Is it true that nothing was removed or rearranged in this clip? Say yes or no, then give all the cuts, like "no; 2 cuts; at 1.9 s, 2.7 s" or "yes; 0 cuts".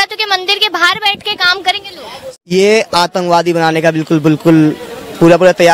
no; 1 cut; at 2.3 s